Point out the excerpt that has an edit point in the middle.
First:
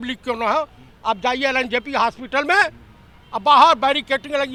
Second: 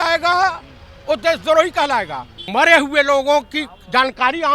second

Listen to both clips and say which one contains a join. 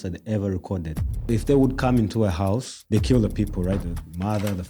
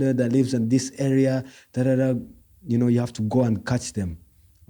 first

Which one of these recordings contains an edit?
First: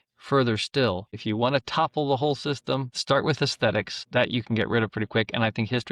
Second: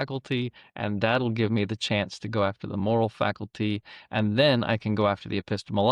first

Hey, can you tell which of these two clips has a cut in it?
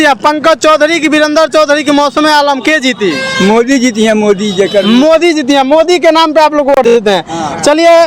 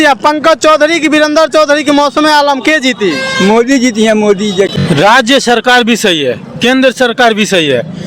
second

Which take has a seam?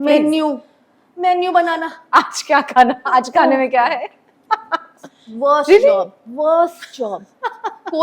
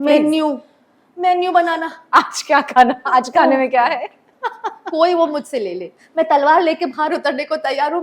second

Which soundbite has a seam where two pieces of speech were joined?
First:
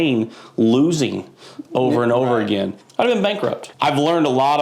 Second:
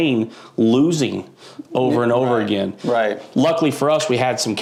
first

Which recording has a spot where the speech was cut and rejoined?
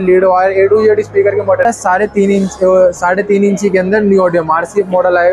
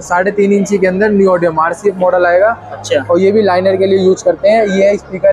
first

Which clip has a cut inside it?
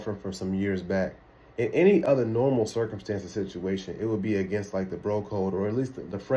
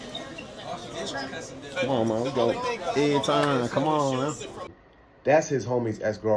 second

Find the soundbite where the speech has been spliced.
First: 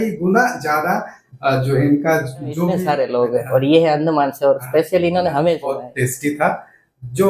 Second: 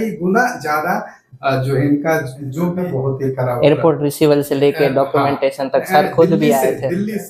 first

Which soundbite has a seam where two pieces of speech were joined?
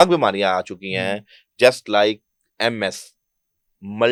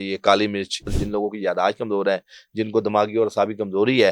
second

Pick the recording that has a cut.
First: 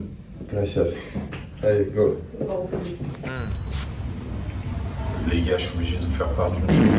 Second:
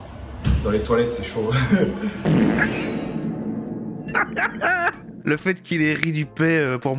second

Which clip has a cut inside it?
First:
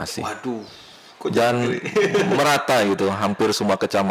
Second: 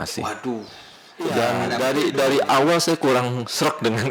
second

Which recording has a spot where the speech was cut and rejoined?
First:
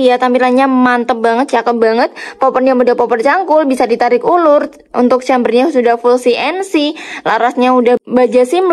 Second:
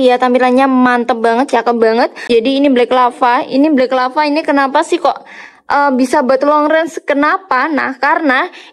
second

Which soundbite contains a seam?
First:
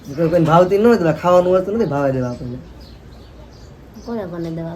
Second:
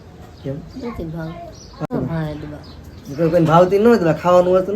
second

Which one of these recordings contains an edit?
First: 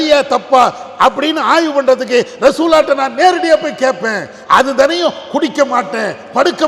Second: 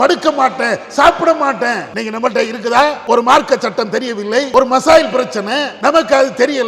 second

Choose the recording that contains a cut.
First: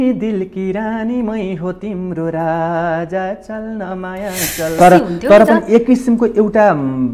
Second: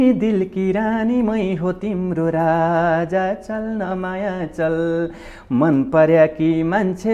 first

